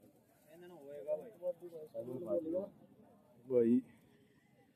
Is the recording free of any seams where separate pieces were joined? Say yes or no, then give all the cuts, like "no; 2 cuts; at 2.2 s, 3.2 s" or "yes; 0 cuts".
yes; 0 cuts